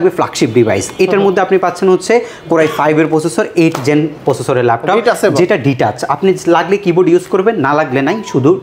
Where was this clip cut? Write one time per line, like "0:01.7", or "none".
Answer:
none